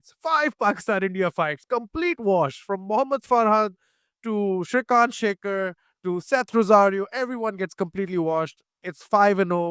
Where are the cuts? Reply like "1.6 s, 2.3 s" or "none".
none